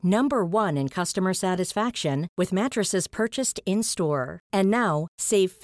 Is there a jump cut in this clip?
no; 0 cuts

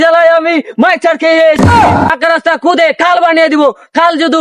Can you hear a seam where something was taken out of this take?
yes; 1 cut; at 1.7 s

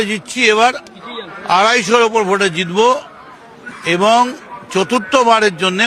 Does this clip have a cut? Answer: no; 0 cuts

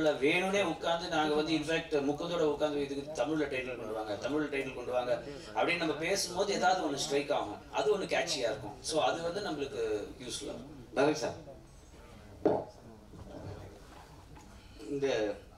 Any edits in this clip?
no; 0 cuts

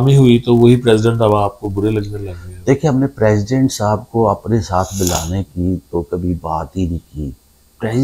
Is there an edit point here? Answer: no; 0 cuts

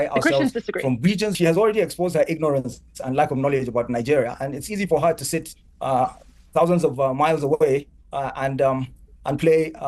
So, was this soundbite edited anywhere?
yes; 1 cut; at 1.3 s

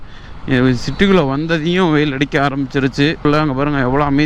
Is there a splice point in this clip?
yes; 1 cut; at 3.2 s

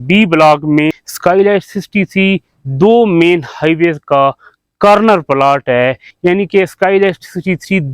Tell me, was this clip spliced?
yes; 2 cuts; at 1.1 s, 6.1 s

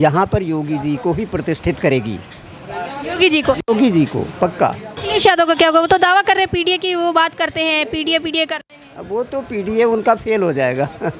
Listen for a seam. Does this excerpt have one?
yes; 1 cut; at 4.9 s

